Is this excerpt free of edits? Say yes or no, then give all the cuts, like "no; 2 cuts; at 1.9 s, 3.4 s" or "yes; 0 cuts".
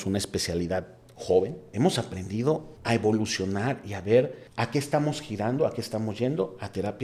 no; 3 cuts; at 1.6 s, 2.7 s, 4.4 s